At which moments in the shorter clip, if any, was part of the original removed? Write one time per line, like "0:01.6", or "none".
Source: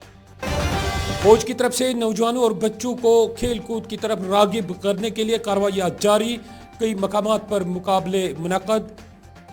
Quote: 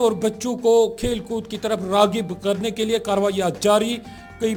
none